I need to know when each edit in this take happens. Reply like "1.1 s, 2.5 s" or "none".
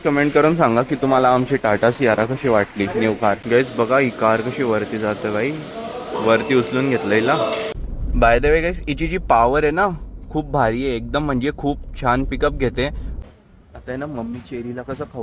3.4 s, 7.8 s, 13.1 s